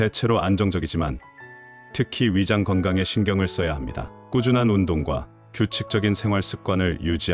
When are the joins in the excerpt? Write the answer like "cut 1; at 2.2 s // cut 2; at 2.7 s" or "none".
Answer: cut 1; at 4.2 s

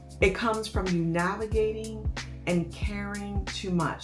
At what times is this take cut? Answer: none

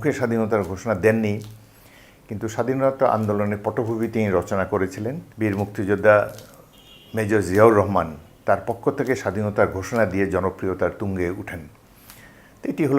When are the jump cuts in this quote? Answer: cut 1; at 5.2 s

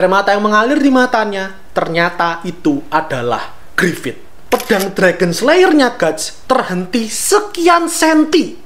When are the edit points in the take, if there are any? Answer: cut 1; at 3.6 s // cut 2; at 4.3 s

